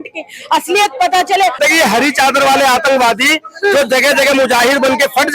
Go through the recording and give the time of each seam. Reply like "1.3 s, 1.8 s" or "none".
1.6 s